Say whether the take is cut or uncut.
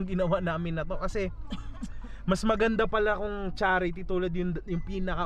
uncut